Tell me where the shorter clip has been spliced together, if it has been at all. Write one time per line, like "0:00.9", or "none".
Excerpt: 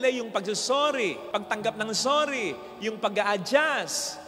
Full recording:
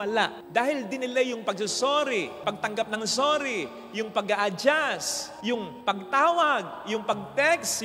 none